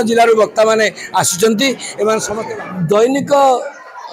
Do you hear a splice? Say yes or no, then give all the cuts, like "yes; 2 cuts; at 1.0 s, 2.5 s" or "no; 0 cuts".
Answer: yes; 1 cut; at 2.3 s